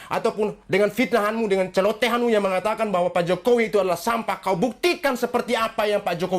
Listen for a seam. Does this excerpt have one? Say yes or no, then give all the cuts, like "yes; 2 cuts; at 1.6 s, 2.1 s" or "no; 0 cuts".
no; 0 cuts